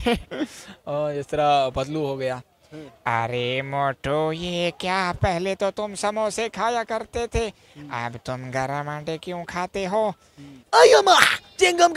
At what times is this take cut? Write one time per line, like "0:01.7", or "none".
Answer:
0:10.5